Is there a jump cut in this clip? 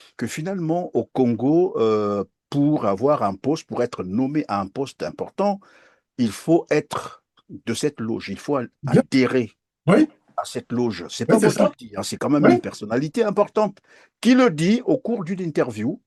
no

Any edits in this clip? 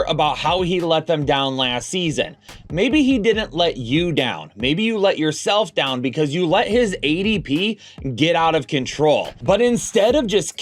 yes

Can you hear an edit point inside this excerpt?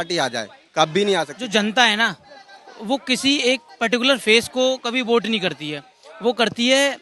yes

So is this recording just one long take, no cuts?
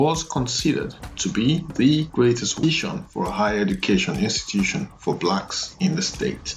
no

